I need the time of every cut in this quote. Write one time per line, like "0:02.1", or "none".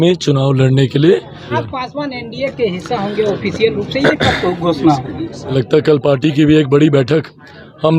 0:01.6
0:05.5